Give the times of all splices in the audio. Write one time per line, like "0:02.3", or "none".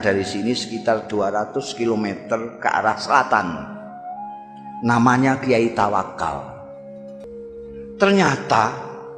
0:07.2